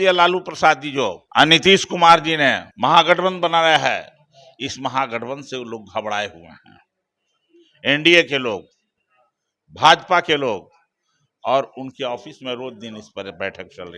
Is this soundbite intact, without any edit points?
no; 2 cuts; at 1.2 s, 2.7 s

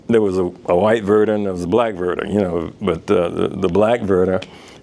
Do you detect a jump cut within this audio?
no; 0 cuts

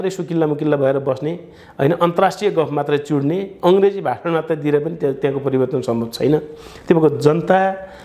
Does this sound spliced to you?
no; 0 cuts

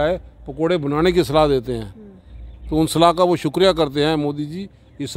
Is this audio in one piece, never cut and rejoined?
yes; 0 cuts

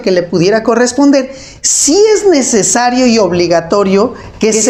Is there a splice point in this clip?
no; 0 cuts

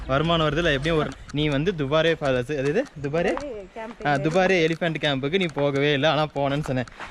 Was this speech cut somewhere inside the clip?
yes; 1 cut; at 1.1 s

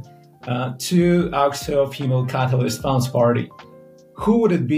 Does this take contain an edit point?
no; 0 cuts

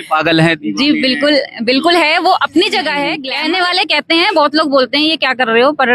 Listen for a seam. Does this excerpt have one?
yes; 1 cut; at 3.2 s

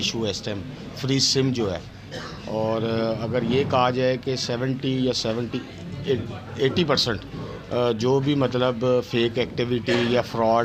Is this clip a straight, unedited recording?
yes; 0 cuts

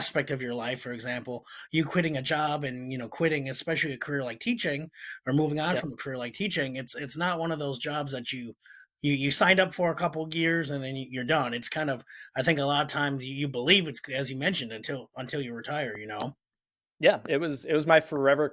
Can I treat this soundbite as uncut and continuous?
yes; 0 cuts

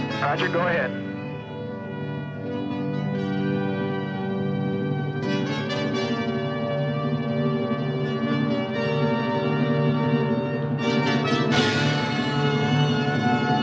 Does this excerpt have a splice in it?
no; 0 cuts

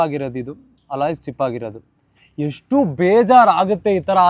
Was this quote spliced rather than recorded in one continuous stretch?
no; 0 cuts

